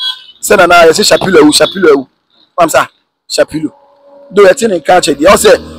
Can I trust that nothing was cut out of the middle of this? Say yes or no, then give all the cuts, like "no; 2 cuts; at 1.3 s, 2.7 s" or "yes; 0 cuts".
yes; 0 cuts